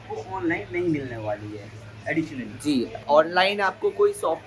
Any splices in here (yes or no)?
no